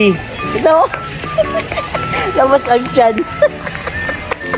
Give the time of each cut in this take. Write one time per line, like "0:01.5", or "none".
none